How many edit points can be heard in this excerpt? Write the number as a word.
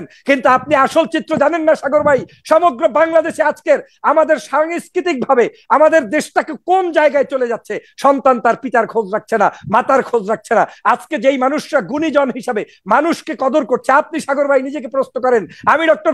zero